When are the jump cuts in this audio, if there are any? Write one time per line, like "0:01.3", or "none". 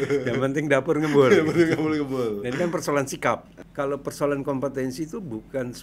0:03.6